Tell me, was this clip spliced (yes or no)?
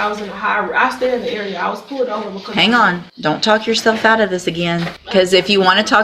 yes